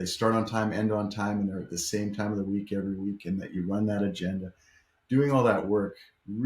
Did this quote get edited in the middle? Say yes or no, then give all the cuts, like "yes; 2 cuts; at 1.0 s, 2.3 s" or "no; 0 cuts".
no; 0 cuts